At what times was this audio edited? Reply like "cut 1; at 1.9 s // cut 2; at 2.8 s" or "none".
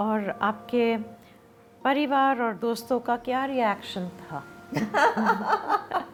none